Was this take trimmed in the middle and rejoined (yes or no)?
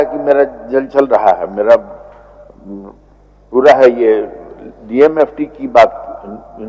no